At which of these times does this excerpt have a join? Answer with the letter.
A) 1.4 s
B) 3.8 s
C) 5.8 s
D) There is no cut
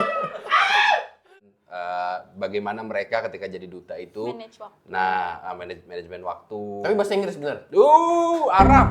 A